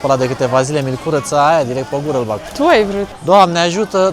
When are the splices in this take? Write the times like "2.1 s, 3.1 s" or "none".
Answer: 3.2 s